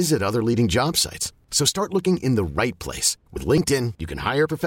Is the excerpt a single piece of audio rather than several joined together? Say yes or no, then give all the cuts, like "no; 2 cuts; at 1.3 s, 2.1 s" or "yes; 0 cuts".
yes; 0 cuts